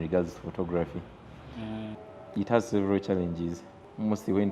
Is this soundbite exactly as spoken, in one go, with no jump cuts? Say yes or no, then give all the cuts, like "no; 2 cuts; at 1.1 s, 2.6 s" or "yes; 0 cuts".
no; 1 cut; at 2.0 s